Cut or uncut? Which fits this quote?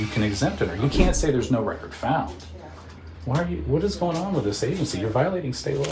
uncut